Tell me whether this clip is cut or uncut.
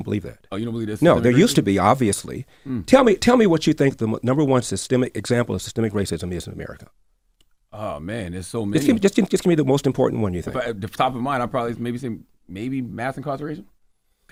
uncut